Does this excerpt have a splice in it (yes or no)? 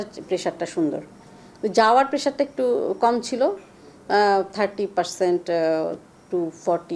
no